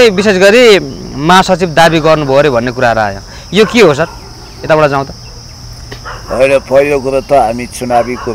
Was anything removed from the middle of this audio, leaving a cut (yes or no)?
no